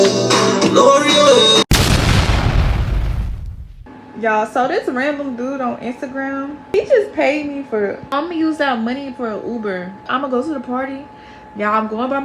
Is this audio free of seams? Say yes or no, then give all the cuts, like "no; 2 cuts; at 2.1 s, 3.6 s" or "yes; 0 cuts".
no; 3 cuts; at 6.7 s, 8.1 s, 10.0 s